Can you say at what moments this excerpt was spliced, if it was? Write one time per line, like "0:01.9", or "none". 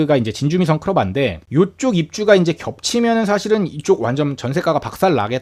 0:01.4